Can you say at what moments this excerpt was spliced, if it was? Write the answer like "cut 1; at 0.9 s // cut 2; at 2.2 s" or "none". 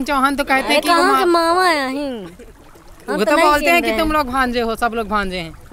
none